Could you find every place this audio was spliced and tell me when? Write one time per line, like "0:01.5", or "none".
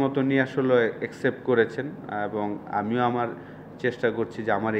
none